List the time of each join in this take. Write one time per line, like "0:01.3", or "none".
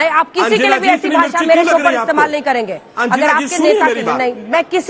none